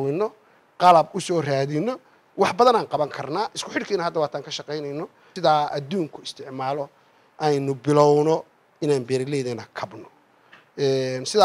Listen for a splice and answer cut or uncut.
cut